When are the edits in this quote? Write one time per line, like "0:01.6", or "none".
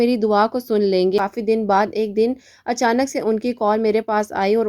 0:01.2